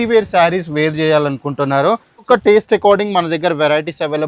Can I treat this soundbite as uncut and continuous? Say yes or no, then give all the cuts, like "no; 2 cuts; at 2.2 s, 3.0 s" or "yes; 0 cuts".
no; 1 cut; at 2.3 s